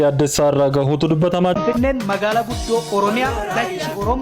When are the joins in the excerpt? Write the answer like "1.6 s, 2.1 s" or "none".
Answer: 1.5 s

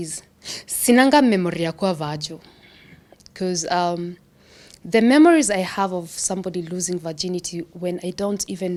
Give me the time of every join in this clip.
none

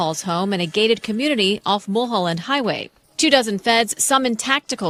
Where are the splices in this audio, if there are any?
none

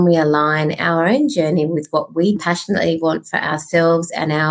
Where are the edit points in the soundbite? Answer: 2.4 s

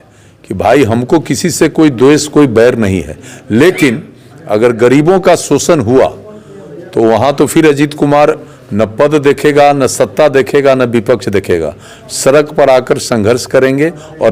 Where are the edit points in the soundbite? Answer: none

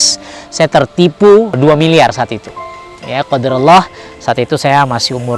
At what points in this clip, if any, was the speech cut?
1.6 s

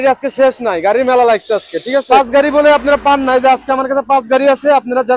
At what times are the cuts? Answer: 2.1 s

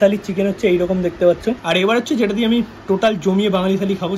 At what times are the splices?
1.6 s

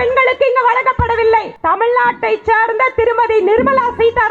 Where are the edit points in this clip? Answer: 1.5 s

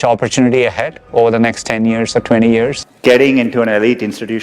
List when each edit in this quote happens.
2.9 s

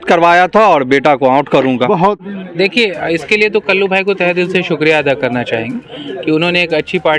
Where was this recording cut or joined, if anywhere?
2.2 s

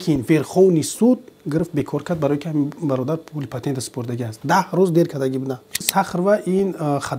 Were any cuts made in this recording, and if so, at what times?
5.9 s

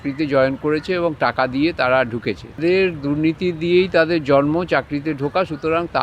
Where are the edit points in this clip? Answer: 2.6 s

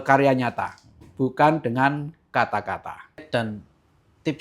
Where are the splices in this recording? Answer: 3.2 s

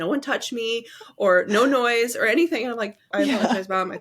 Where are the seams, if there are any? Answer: 3.1 s

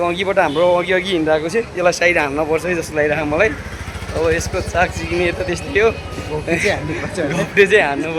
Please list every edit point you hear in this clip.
none

